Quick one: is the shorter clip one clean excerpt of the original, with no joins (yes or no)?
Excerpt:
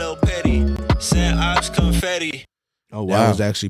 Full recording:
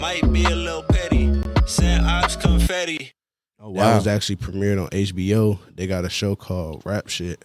yes